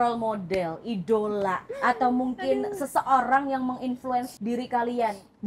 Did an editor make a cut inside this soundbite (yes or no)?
yes